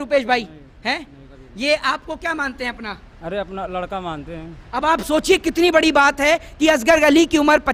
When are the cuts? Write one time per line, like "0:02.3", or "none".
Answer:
none